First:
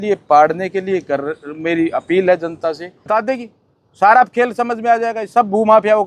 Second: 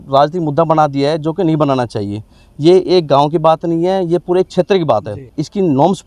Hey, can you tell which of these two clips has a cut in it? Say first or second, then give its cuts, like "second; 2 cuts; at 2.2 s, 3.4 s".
first; 1 cut; at 3.1 s